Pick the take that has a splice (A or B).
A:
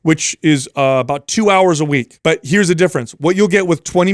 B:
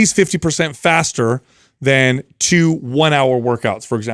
A